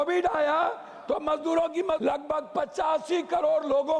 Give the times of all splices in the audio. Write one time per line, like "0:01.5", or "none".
0:02.0